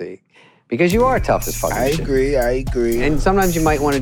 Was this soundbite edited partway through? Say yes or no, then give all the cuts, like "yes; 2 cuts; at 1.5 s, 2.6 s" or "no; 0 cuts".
yes; 1 cut; at 3.0 s